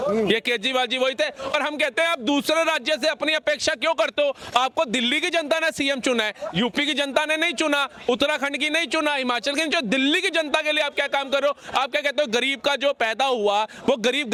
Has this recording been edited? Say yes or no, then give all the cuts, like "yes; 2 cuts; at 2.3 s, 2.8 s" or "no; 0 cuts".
no; 0 cuts